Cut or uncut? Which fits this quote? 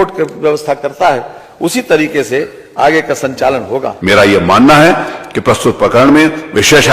cut